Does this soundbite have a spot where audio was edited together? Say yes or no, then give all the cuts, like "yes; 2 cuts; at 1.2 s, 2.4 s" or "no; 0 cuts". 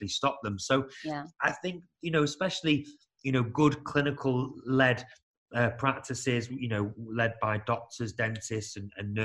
no; 0 cuts